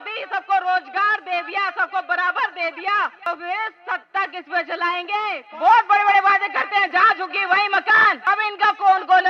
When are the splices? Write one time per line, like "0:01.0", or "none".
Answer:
0:03.3
0:05.4
0:08.2